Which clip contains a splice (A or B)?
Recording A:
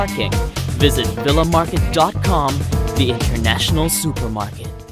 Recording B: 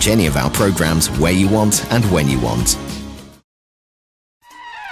B